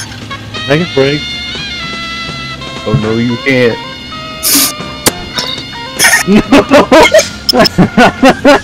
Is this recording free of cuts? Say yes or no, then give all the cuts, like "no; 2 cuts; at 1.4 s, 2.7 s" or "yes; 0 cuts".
no; 1 cut; at 7.4 s